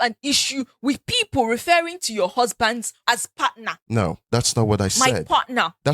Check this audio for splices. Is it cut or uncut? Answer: cut